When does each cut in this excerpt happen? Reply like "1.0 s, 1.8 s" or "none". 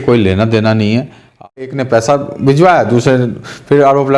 1.7 s